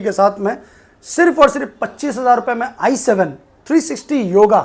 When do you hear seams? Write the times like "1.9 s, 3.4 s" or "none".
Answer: none